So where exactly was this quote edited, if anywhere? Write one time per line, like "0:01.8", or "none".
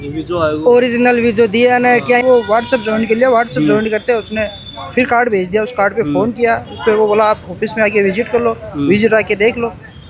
0:02.2